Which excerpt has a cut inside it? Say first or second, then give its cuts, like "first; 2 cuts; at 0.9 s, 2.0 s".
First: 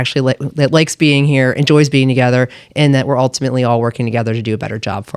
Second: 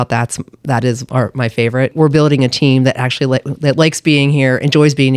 second; 1 cut; at 1.9 s